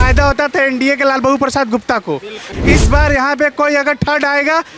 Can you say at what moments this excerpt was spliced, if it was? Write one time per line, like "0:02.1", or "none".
0:02.5